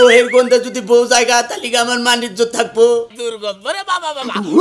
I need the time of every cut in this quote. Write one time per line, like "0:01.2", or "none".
0:03.2